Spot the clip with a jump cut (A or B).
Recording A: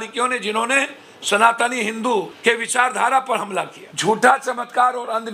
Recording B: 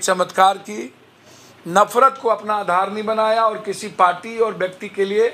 A